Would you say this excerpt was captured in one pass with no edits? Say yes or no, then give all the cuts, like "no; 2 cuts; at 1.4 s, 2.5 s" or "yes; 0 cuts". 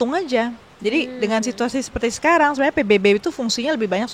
yes; 0 cuts